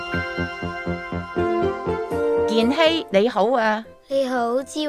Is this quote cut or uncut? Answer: uncut